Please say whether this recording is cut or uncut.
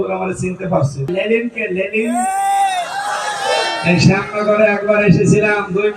cut